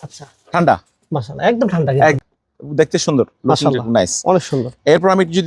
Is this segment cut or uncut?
cut